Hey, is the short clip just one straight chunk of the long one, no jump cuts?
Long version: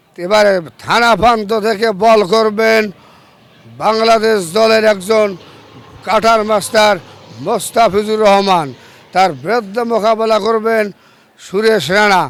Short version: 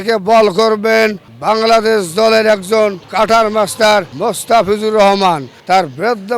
no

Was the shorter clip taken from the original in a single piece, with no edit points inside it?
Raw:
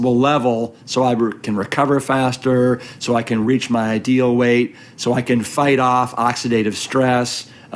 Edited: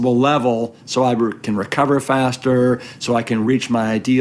yes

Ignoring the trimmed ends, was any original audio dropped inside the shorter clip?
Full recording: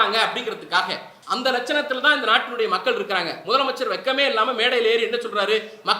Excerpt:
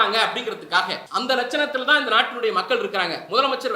yes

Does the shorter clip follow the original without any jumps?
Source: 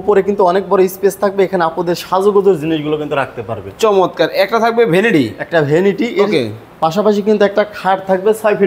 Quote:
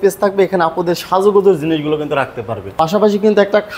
no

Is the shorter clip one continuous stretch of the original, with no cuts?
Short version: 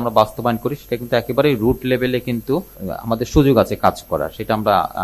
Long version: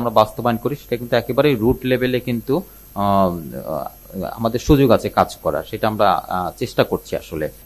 no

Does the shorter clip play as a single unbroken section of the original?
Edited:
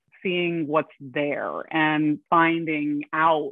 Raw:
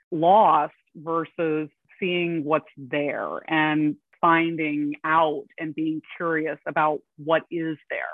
no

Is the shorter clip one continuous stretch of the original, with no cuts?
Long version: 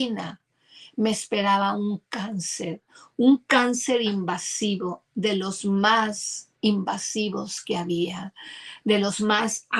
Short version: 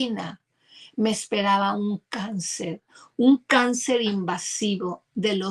yes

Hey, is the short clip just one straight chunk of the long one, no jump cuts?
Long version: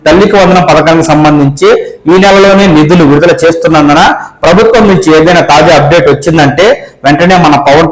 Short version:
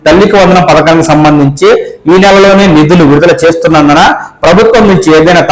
yes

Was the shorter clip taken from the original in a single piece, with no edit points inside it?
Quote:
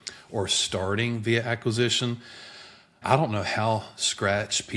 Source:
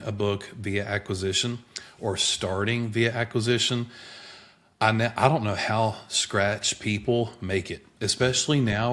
no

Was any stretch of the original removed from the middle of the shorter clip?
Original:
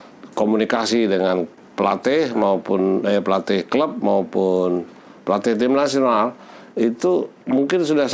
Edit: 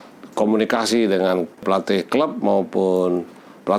yes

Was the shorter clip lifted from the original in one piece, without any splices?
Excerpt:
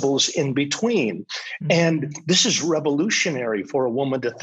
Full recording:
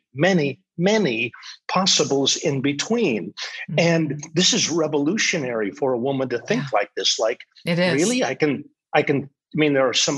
yes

